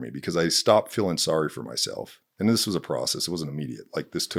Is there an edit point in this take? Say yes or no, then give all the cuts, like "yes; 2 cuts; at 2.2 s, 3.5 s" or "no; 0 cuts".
no; 0 cuts